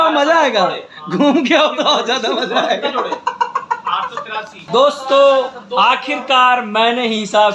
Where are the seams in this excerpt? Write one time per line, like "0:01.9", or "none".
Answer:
0:04.7